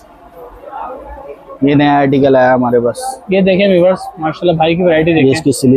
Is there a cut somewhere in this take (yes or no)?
no